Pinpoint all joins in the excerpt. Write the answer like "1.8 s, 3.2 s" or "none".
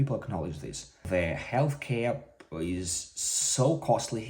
1.0 s